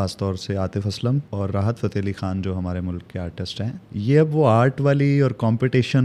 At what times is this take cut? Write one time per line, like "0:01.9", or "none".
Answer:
0:01.3
0:03.8